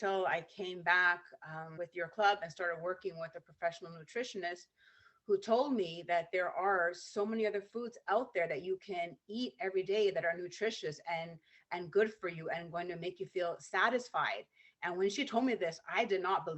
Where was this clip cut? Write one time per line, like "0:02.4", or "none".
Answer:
0:01.6